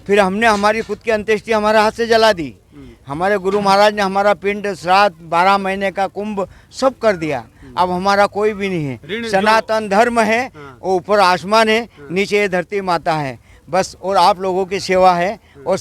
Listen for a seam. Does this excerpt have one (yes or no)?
no